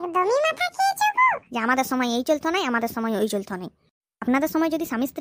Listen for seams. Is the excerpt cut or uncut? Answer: cut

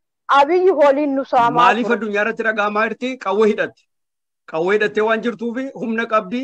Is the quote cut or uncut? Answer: cut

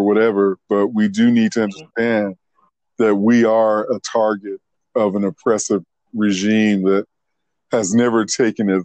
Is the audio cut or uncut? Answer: uncut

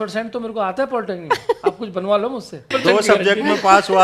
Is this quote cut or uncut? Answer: cut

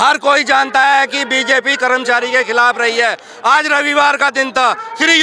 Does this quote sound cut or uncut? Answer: uncut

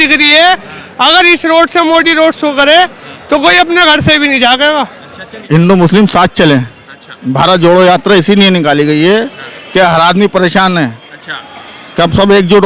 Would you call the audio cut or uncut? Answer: cut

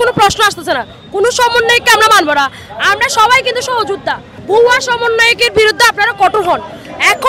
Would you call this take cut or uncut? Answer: cut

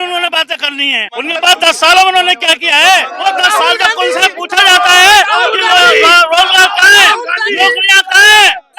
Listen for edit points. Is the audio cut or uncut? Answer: cut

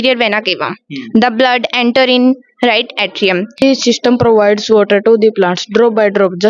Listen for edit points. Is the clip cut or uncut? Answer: cut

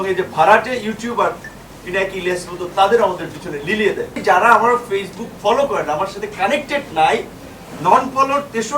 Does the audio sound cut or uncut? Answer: cut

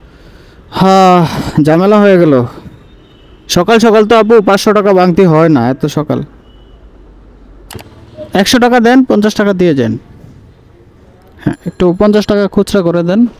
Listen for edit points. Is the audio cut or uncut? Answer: cut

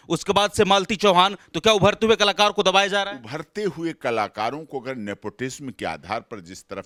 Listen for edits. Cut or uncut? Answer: uncut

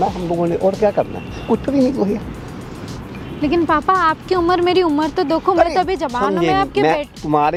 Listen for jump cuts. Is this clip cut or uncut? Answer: uncut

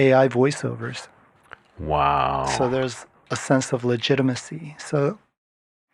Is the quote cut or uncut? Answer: uncut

